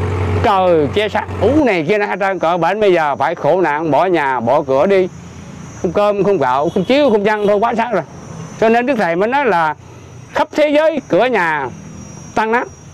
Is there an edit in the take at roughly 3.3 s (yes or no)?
no